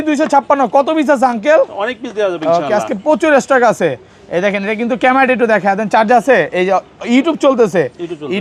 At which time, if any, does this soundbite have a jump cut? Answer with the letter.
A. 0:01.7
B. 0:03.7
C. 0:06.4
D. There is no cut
D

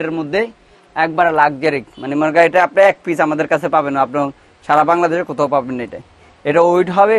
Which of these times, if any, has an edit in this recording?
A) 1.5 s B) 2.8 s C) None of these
C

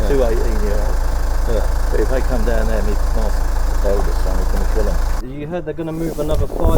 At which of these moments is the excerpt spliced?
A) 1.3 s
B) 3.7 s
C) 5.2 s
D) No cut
C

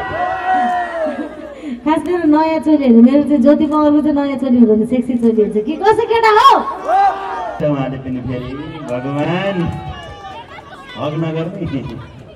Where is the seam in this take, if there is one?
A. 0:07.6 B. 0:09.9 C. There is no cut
A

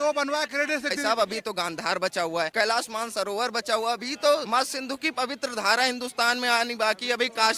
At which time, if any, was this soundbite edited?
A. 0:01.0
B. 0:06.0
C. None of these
A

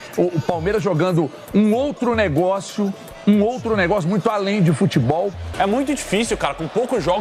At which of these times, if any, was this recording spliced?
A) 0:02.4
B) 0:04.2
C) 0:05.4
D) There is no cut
C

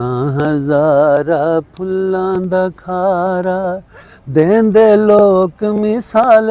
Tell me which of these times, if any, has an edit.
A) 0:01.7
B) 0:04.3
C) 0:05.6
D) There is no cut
D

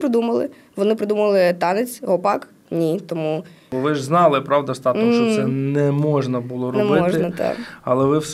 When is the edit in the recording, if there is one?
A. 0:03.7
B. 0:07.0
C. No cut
A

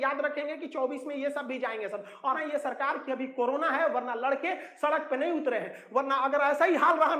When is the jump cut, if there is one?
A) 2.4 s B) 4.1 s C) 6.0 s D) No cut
A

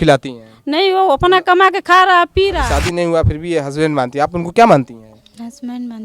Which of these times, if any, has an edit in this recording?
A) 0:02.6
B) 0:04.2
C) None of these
A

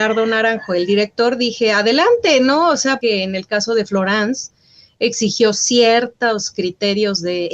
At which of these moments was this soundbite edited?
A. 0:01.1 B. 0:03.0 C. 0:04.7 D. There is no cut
B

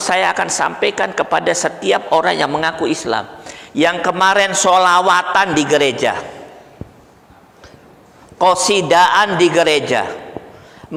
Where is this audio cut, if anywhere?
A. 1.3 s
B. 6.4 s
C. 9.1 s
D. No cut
D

